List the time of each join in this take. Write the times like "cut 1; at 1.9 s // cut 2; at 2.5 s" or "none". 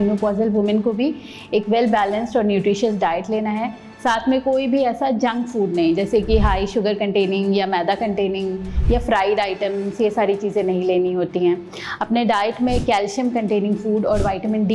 none